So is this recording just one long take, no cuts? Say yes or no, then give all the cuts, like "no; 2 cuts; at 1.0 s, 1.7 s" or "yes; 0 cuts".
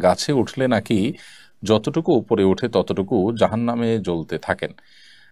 yes; 0 cuts